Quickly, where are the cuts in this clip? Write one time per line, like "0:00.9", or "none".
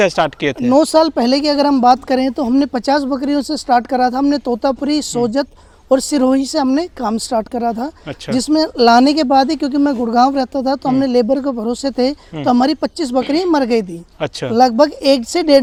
none